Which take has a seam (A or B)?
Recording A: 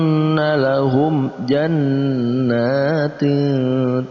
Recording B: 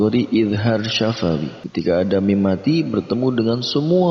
B